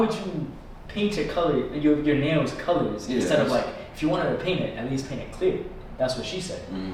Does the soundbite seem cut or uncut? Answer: uncut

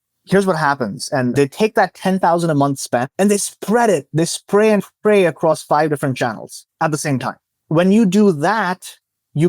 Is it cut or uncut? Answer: cut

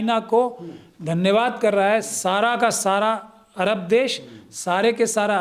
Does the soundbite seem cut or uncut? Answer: uncut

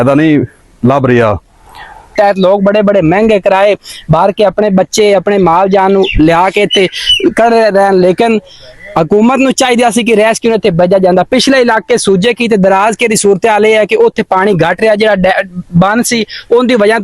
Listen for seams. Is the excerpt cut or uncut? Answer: cut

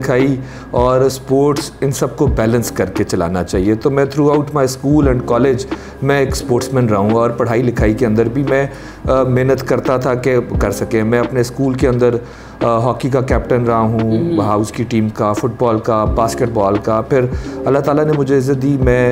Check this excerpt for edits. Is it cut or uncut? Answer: uncut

